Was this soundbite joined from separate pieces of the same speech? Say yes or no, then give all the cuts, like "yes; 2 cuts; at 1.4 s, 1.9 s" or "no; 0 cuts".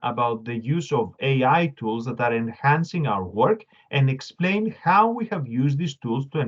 no; 0 cuts